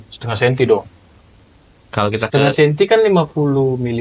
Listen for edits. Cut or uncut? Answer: uncut